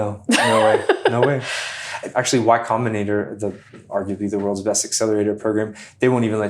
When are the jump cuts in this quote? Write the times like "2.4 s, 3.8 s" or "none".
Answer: 2.1 s, 3.7 s